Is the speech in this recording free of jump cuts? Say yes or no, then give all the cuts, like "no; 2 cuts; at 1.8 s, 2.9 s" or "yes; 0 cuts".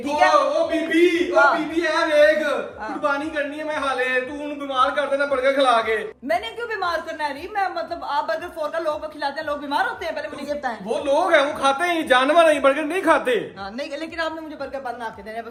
yes; 0 cuts